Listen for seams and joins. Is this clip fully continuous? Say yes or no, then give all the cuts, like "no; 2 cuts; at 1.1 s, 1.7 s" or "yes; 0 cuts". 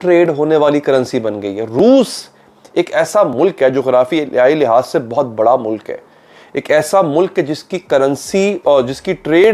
yes; 0 cuts